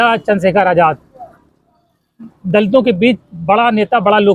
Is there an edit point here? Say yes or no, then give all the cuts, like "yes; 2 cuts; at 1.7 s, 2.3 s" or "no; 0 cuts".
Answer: no; 0 cuts